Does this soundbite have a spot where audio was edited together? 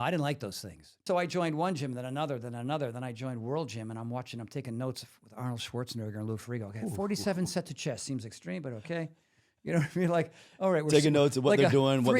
yes; 1 cut; at 1.0 s

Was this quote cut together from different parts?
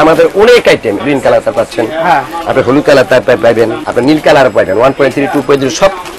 yes; 2 cuts; at 1.0 s, 3.8 s

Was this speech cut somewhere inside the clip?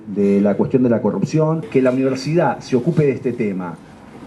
yes; 1 cut; at 1.7 s

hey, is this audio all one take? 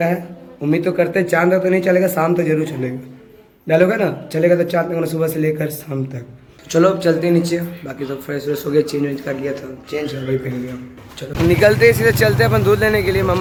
yes; 0 cuts

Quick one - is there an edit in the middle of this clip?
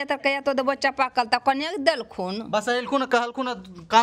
no; 0 cuts

